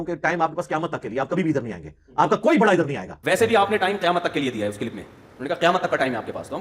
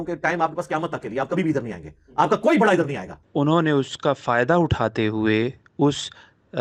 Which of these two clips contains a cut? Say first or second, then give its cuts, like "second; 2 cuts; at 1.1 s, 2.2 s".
first; 1 cut; at 3.1 s